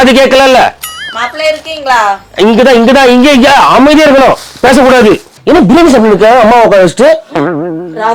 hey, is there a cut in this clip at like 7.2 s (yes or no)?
no